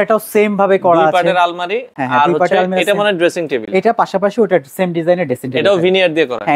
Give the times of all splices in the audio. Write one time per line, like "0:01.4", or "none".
none